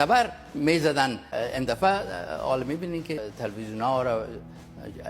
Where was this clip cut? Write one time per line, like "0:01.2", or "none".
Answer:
0:01.3
0:03.2